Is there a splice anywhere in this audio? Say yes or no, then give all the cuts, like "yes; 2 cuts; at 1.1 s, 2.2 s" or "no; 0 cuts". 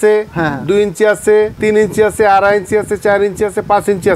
no; 0 cuts